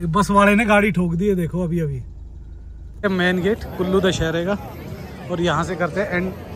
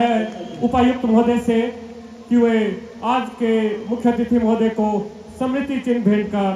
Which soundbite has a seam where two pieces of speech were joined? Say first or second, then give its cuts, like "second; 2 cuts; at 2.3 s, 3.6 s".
first; 1 cut; at 3.0 s